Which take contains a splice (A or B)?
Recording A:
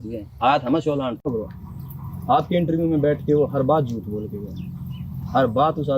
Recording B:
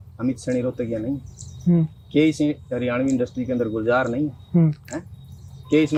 A